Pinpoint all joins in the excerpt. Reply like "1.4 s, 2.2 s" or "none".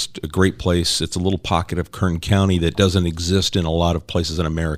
none